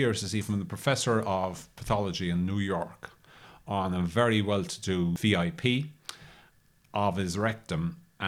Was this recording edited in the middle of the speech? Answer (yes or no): yes